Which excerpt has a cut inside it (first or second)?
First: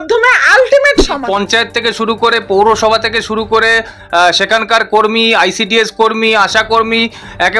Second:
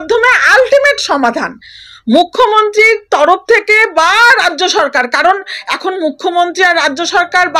first